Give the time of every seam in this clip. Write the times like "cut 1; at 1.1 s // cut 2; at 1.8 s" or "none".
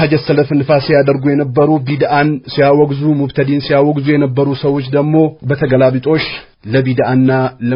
none